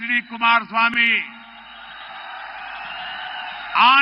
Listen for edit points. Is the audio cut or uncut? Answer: cut